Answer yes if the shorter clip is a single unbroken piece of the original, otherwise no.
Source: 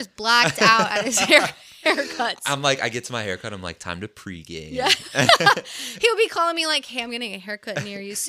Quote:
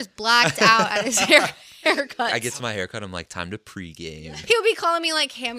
no